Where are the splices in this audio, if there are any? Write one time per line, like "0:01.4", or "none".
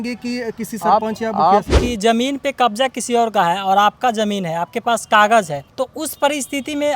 0:01.8